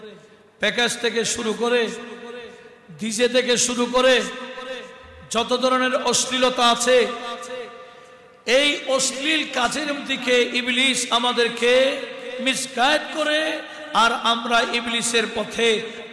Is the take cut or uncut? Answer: uncut